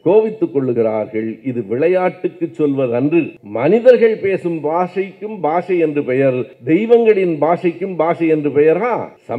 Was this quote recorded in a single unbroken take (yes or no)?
yes